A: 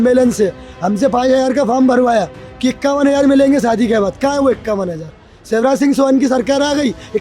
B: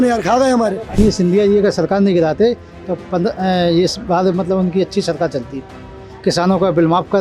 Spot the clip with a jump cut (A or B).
B